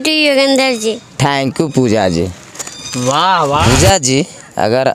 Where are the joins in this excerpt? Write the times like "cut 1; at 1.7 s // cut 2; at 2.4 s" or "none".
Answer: cut 1; at 3.6 s